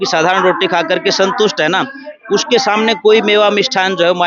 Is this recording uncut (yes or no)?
yes